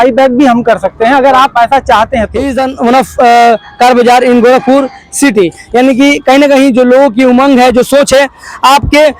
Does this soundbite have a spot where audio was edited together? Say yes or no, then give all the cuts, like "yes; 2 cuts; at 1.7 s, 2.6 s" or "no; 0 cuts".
yes; 1 cut; at 2.4 s